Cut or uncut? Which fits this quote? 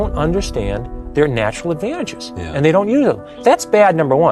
cut